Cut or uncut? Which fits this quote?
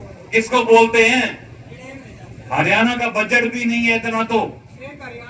uncut